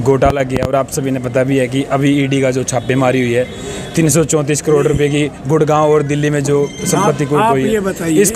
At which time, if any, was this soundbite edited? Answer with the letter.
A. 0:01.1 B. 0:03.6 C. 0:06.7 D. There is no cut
D